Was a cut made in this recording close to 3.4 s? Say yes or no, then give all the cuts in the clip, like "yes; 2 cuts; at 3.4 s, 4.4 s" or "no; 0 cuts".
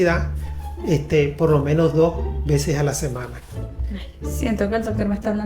no; 0 cuts